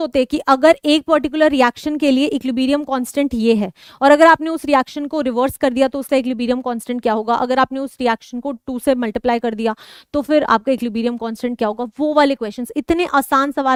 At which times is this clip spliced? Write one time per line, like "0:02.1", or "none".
none